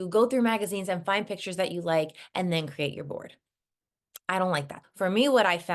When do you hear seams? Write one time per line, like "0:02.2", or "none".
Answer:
0:04.8